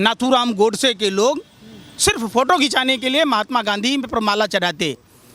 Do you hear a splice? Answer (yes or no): no